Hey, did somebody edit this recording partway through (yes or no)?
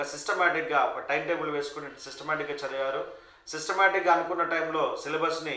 no